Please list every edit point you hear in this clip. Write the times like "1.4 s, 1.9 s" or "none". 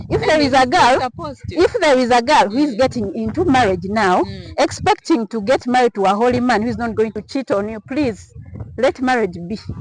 7.2 s